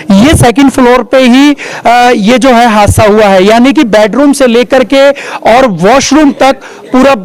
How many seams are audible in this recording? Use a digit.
0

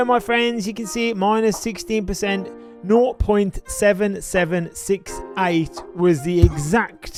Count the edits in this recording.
0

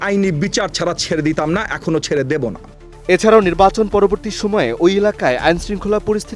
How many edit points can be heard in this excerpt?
0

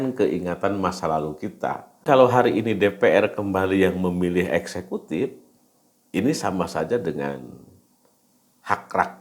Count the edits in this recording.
1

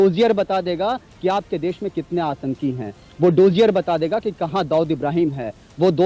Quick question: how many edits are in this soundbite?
0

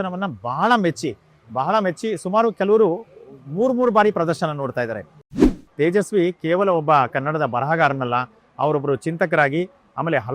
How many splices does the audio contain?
1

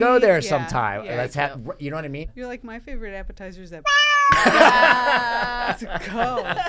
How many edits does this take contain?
1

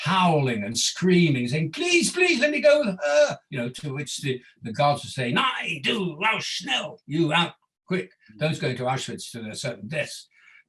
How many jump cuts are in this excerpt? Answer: 1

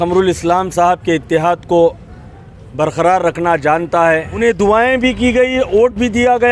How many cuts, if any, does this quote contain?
1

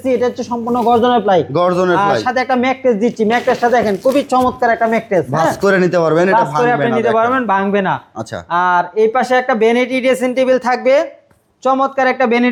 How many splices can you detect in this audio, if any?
0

